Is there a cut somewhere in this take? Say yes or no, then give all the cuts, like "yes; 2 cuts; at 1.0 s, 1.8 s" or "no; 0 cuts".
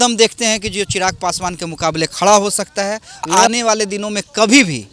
yes; 1 cut; at 3.3 s